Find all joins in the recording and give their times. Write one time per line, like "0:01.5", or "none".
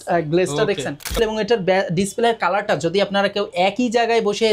0:01.1